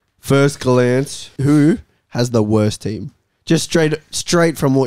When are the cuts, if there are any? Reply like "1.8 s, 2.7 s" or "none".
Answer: 1.3 s

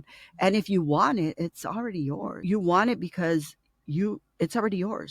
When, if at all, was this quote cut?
2.4 s

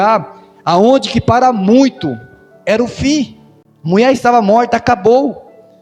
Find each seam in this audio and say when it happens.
none

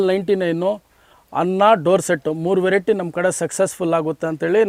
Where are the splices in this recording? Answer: none

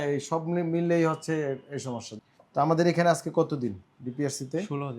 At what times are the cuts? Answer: 2.1 s

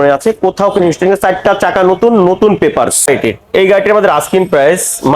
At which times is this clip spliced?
3.1 s

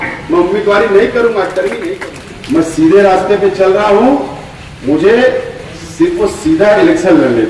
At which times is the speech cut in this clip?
1.9 s

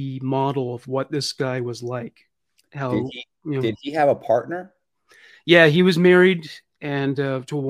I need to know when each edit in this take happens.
none

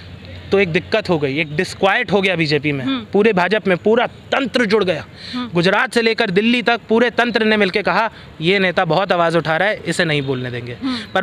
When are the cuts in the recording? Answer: none

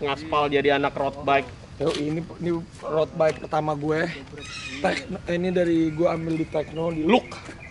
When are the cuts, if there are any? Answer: none

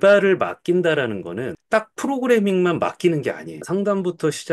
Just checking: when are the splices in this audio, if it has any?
1.5 s, 3.5 s

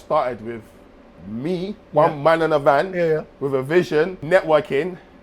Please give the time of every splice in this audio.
4.2 s

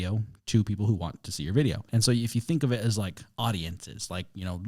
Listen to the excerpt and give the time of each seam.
1.9 s

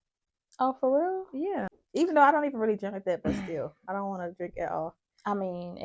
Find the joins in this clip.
1.8 s

